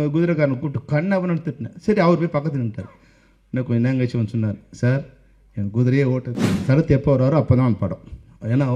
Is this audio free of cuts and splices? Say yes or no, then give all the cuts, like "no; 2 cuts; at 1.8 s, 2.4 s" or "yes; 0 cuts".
no; 1 cut; at 6.5 s